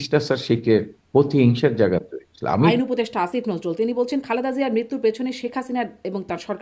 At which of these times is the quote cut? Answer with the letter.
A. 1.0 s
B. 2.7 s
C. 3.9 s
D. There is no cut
B